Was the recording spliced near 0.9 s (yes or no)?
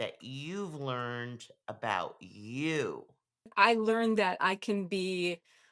no